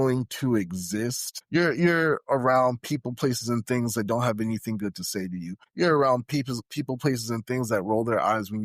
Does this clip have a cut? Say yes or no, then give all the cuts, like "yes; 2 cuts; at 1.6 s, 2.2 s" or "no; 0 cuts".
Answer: yes; 2 cuts; at 1.3 s, 5.6 s